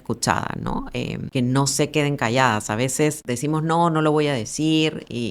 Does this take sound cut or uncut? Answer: cut